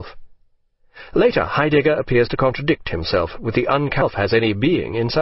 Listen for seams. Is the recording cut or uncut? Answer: uncut